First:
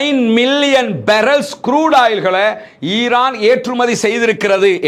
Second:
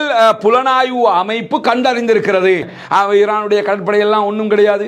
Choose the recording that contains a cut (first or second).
second